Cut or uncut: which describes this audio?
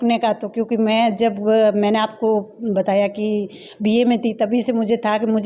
uncut